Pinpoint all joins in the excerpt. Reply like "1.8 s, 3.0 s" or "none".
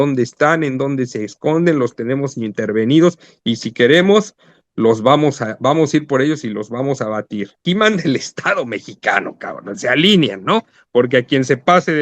7.6 s